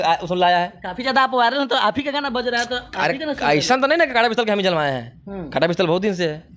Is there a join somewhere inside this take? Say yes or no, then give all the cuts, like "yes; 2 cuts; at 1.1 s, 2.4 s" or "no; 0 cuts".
no; 0 cuts